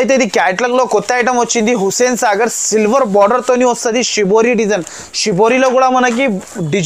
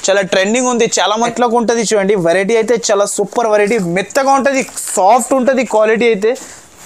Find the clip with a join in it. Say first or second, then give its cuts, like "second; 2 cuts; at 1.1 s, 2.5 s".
second; 1 cut; at 1.3 s